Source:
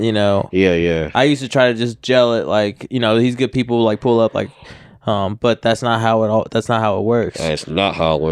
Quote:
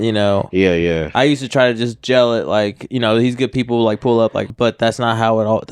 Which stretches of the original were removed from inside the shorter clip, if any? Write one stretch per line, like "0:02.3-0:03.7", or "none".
0:04.5-0:05.3